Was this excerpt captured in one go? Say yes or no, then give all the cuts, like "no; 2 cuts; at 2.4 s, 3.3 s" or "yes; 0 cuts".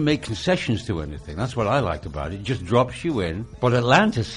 no; 1 cut; at 3.4 s